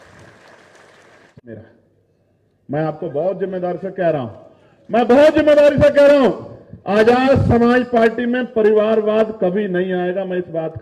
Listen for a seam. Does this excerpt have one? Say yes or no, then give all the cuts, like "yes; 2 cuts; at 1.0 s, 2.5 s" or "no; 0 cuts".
yes; 1 cut; at 1.3 s